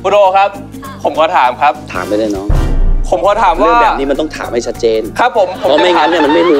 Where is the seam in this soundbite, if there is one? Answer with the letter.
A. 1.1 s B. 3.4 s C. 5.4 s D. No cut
D